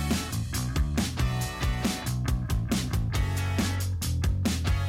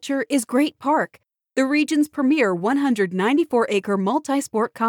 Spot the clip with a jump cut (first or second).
first